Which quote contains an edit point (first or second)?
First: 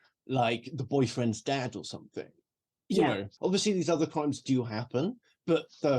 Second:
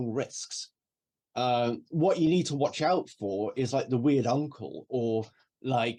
first